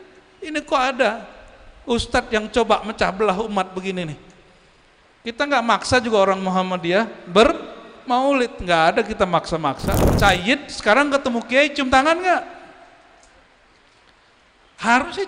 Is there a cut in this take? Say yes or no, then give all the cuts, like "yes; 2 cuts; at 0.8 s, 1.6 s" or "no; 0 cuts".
yes; 1 cut; at 10.1 s